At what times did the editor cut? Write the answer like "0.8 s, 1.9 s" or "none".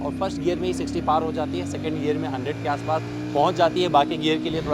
none